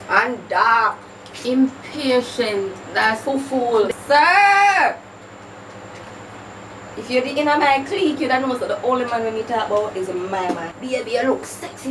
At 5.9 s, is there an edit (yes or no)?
no